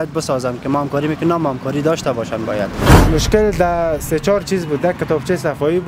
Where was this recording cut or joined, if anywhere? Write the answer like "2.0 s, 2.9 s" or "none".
2.9 s